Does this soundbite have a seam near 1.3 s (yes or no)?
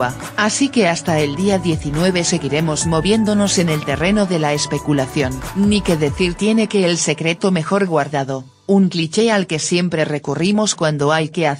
no